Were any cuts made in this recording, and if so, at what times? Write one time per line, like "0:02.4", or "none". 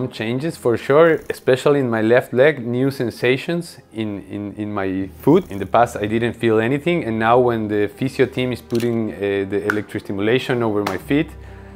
0:01.3
0:05.6